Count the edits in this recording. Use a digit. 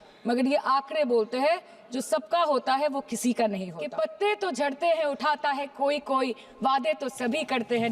1